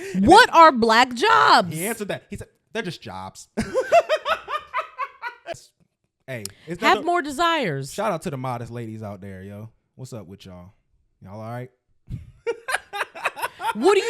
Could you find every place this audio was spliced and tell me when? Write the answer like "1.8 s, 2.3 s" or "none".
5.6 s